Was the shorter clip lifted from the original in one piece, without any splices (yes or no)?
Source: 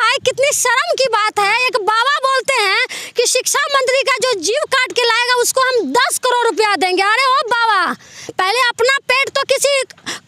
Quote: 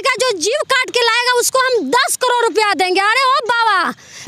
yes